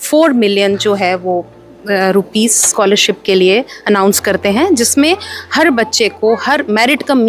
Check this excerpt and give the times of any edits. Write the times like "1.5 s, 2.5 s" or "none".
none